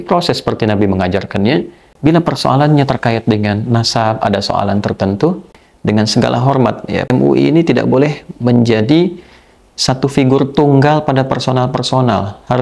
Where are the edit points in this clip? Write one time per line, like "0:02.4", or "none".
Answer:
0:01.8
0:05.5
0:07.1